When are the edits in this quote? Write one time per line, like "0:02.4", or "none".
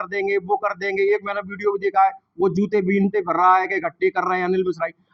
none